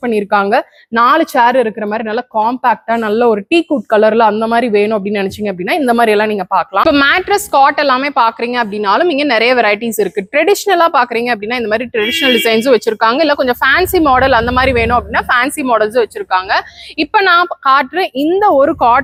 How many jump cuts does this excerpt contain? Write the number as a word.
zero